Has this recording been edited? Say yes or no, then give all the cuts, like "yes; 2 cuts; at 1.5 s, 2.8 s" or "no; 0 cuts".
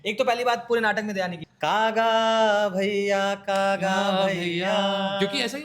yes; 1 cut; at 1.4 s